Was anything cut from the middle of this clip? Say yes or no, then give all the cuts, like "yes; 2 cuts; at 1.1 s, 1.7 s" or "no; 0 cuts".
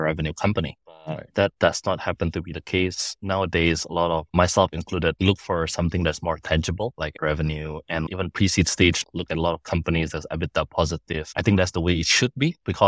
yes; 5 cuts; at 3.1 s, 6.9 s, 8.1 s, 9.0 s, 11.3 s